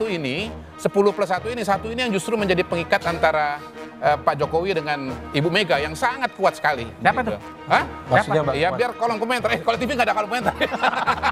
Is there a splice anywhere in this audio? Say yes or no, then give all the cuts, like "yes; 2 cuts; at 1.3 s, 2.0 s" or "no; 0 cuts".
no; 0 cuts